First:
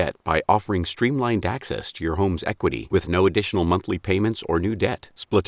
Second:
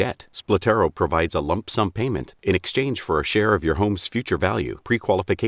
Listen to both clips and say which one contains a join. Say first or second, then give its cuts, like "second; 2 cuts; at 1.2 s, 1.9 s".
second; 1 cut; at 1.9 s